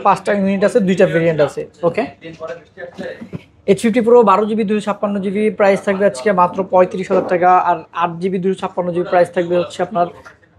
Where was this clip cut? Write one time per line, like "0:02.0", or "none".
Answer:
none